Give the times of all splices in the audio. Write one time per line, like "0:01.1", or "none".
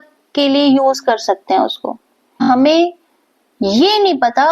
0:02.4